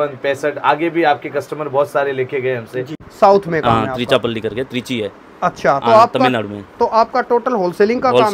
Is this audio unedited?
no; 1 cut; at 3.0 s

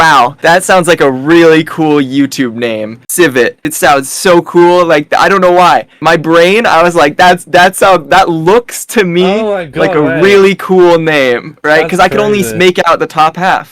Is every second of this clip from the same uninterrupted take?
yes; 0 cuts

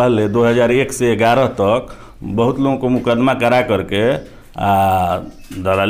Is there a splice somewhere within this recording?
no; 0 cuts

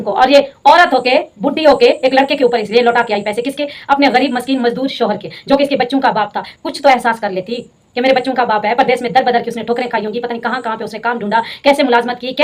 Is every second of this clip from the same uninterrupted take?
yes; 0 cuts

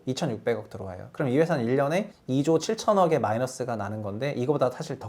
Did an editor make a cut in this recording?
yes; 1 cut; at 2.2 s

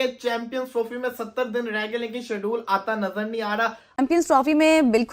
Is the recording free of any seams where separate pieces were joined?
no; 1 cut; at 3.9 s

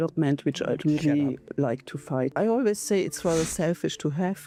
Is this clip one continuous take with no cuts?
yes; 0 cuts

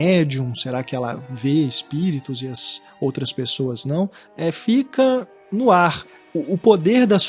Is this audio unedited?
no; 3 cuts; at 4.2 s, 5.4 s, 6.1 s

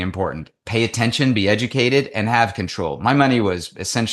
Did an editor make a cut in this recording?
no; 0 cuts

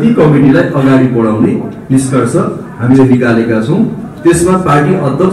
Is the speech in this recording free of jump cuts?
yes; 0 cuts

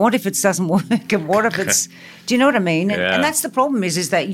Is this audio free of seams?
yes; 0 cuts

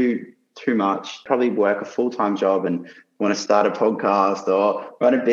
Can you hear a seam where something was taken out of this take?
yes; 1 cut; at 1.2 s

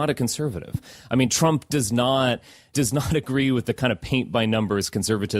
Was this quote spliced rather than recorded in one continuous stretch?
yes; 1 cut; at 2.7 s

